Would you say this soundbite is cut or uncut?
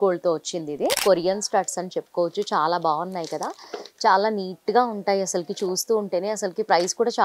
cut